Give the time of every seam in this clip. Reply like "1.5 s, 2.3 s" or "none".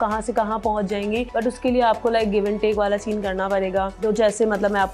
1.3 s, 3.9 s